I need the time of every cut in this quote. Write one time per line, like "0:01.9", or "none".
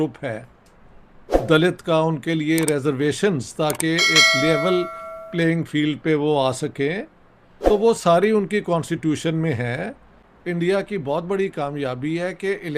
0:10.1